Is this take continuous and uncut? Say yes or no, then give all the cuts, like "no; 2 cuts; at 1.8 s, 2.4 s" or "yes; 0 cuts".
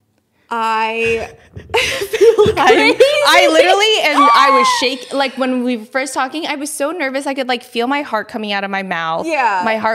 yes; 0 cuts